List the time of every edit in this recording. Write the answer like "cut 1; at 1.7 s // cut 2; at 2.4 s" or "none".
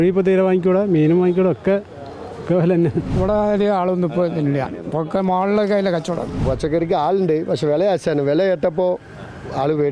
cut 1; at 3.2 s // cut 2; at 6.3 s